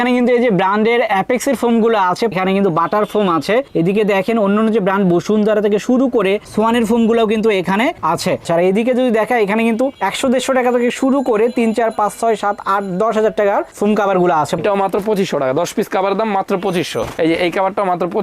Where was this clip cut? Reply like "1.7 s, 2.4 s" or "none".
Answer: 2.3 s, 8.4 s, 14.6 s